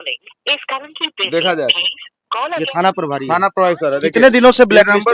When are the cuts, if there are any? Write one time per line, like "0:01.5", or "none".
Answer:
none